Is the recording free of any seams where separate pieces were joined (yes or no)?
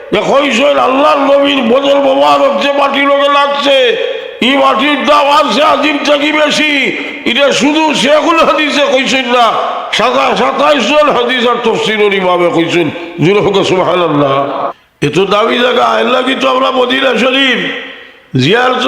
no